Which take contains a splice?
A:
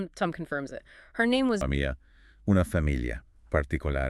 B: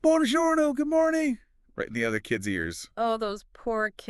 A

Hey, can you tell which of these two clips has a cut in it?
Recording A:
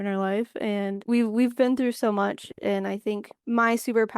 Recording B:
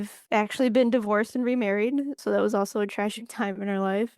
B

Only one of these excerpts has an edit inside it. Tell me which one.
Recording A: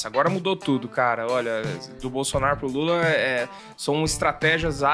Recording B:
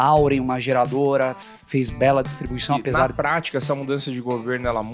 B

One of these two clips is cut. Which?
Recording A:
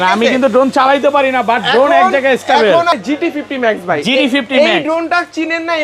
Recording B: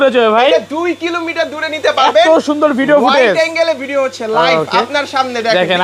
A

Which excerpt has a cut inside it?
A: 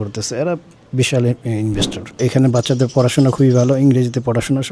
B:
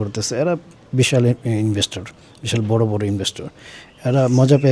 A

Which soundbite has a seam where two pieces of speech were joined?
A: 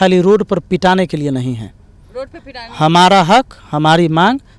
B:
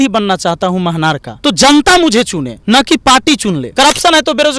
B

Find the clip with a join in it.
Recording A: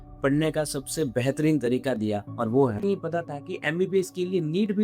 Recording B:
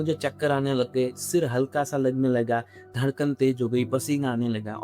A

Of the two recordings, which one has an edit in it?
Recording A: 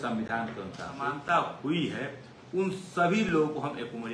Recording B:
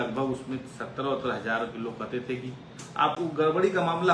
A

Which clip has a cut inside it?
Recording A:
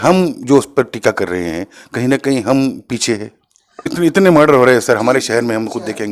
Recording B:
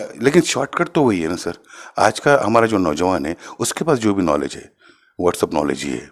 A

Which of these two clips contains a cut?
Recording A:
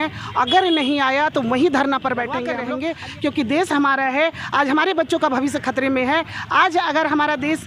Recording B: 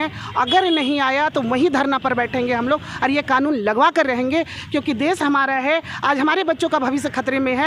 A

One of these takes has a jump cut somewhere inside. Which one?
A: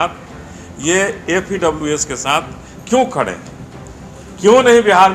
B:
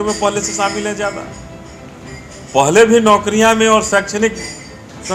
A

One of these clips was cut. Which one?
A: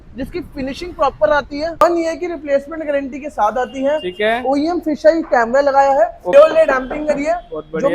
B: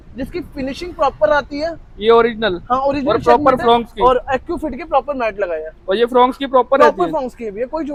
A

